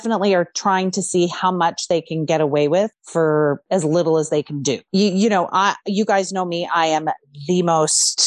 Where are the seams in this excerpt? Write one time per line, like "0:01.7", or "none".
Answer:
0:04.8